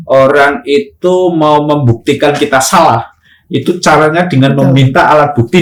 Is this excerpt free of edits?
yes; 0 cuts

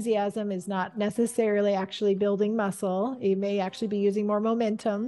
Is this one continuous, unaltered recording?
yes; 0 cuts

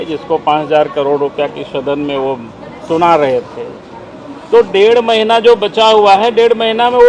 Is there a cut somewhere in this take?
no; 0 cuts

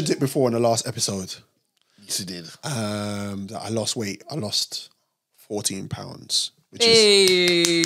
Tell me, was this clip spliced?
no; 0 cuts

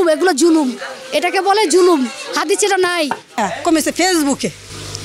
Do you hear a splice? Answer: yes; 1 cut; at 3.4 s

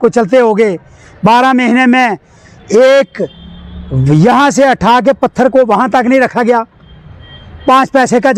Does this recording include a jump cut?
no; 0 cuts

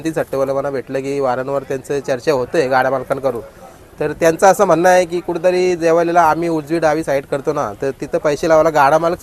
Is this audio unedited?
yes; 0 cuts

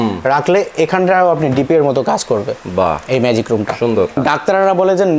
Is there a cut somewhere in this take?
yes; 1 cut; at 4.2 s

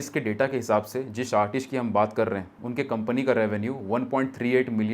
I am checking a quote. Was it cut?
yes; 1 cut; at 2.6 s

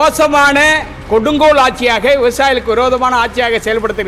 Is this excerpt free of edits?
yes; 0 cuts

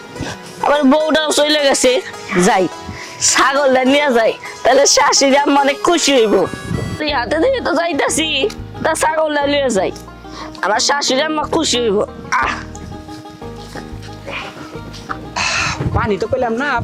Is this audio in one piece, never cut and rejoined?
yes; 0 cuts

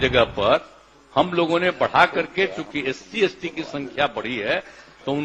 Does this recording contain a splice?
no; 0 cuts

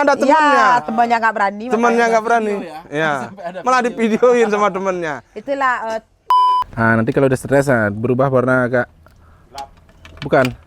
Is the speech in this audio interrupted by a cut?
yes; 1 cut; at 6.3 s

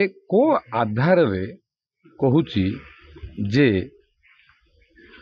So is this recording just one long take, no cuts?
yes; 0 cuts

